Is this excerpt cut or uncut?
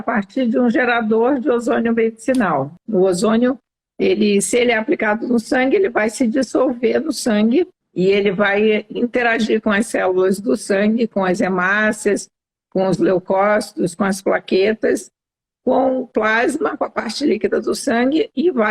cut